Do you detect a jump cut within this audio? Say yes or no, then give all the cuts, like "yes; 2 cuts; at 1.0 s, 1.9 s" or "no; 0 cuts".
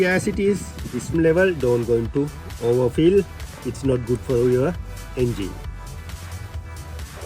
yes; 1 cut; at 1.1 s